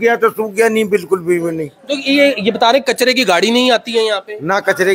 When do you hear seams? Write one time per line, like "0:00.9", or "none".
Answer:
none